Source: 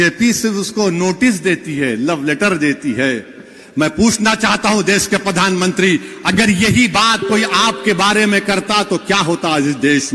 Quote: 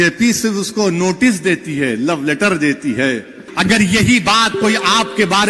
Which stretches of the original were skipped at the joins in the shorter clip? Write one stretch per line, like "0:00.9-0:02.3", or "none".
0:03.5-0:06.1